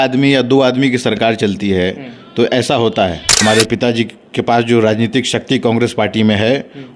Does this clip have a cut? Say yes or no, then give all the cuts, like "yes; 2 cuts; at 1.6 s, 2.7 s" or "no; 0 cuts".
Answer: yes; 1 cut; at 3.3 s